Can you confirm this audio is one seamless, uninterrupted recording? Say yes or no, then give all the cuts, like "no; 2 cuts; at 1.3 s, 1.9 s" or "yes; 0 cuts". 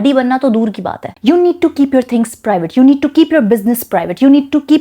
no; 1 cut; at 1.0 s